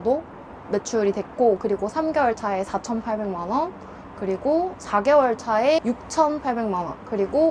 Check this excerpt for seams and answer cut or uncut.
cut